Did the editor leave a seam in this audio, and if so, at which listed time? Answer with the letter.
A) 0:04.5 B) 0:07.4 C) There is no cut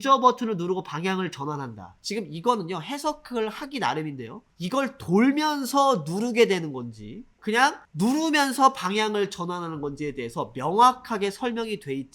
B